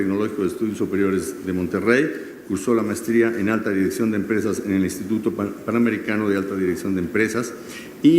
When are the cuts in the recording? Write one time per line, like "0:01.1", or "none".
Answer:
0:01.6